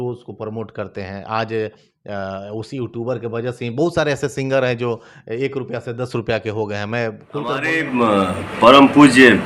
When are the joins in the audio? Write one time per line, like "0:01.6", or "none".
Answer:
0:07.8